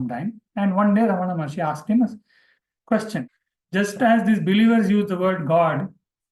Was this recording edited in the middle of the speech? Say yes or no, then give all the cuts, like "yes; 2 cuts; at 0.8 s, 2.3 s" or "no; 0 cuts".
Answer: yes; 1 cut; at 3.2 s